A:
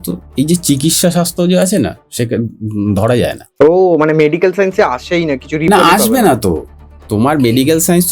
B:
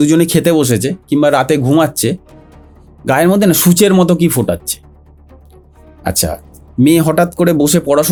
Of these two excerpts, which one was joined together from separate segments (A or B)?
A